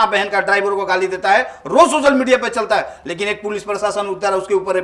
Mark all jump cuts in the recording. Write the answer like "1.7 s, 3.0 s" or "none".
none